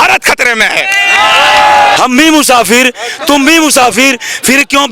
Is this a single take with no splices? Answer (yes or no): no